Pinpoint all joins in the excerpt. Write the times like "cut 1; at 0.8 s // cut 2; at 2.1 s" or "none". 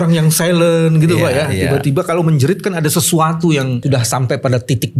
cut 1; at 3.8 s